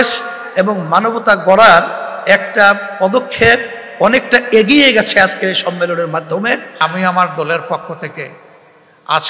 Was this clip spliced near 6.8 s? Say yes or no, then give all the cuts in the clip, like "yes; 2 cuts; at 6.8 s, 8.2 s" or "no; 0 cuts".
yes; 1 cut; at 6.8 s